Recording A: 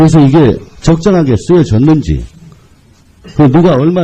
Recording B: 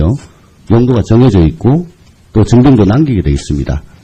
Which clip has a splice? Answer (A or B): B